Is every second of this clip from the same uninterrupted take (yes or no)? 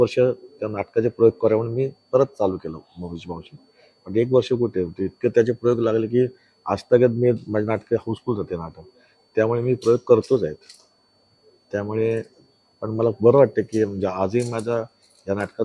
yes